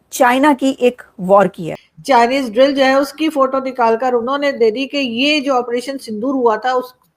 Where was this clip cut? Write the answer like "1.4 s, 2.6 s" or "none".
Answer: 1.7 s